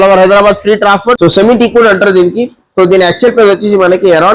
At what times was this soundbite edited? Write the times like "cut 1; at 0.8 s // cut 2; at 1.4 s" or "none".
cut 1; at 1.2 s